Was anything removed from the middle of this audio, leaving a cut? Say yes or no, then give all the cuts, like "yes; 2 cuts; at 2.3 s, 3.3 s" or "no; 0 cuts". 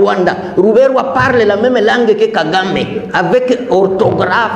no; 0 cuts